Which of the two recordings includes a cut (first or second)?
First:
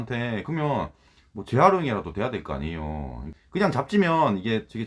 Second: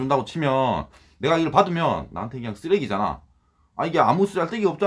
first